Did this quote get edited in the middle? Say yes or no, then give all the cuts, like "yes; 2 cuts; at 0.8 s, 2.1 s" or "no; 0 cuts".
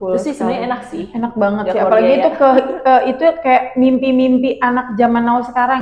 no; 0 cuts